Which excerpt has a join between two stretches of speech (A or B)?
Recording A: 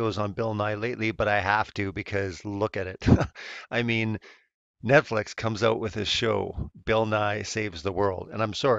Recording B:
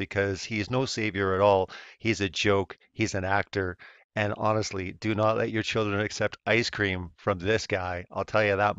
B